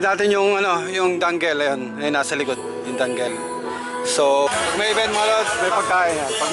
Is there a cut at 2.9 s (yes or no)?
no